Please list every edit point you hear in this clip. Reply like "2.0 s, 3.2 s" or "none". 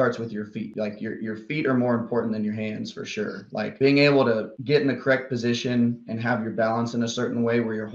none